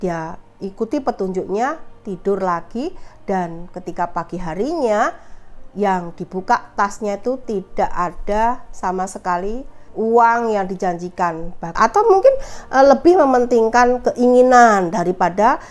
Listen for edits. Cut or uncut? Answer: cut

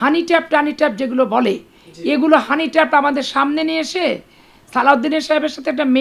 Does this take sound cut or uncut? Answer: uncut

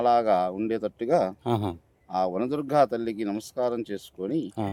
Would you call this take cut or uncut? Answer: uncut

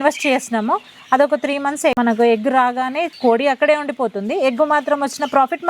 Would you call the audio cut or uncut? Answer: cut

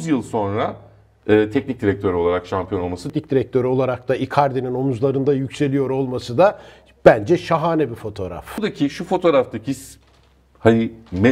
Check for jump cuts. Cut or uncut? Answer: cut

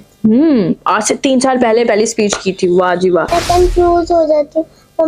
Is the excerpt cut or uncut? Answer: cut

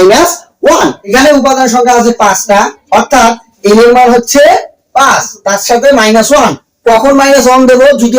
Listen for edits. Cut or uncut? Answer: cut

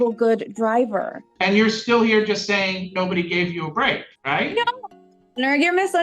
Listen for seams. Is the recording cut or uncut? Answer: cut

